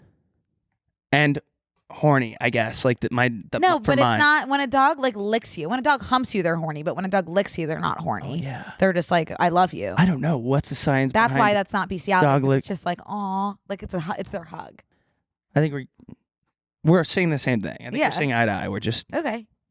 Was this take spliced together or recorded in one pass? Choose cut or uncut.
cut